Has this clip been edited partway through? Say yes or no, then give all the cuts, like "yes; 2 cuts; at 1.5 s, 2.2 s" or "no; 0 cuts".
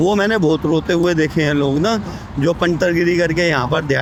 no; 0 cuts